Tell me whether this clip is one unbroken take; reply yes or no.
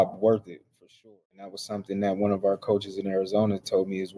no